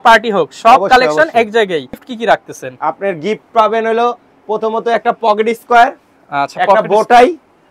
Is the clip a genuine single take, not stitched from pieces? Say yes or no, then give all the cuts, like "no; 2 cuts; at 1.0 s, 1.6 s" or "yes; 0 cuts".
no; 1 cut; at 2.0 s